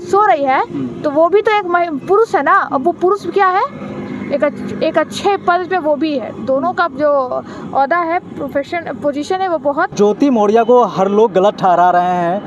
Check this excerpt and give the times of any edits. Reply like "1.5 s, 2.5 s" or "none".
none